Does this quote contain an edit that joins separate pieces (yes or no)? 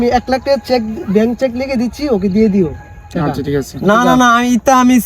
no